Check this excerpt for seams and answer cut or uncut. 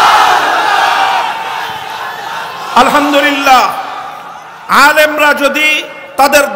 uncut